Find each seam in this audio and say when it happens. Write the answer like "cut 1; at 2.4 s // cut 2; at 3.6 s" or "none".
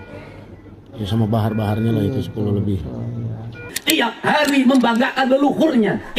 cut 1; at 3.8 s